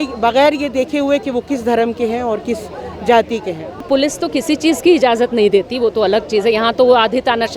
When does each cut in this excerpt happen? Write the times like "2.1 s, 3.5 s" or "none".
3.8 s